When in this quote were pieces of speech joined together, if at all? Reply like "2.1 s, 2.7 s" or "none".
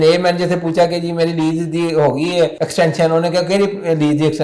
2.6 s

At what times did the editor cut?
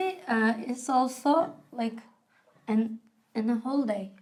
none

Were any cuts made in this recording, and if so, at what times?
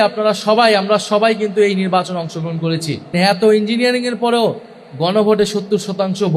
3.1 s

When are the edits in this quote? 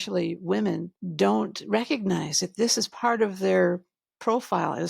1.0 s

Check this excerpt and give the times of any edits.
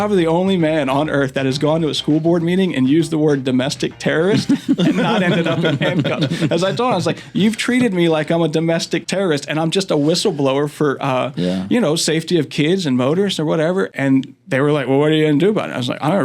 9.1 s, 13.9 s

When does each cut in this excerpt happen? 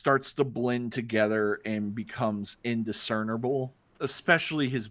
3.9 s

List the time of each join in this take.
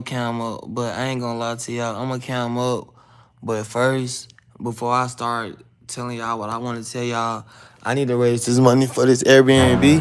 none

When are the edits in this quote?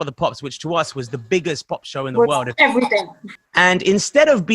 3.2 s

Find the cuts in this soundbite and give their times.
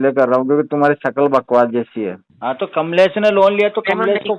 2.3 s

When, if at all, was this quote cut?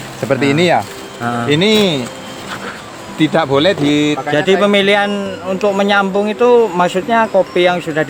4.2 s

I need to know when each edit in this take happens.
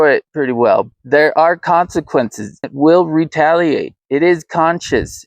0.9 s, 2.6 s, 3.9 s

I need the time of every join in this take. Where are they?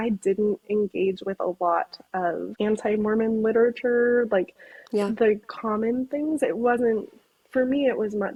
none

